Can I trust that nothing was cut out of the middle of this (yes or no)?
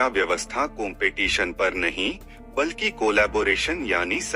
yes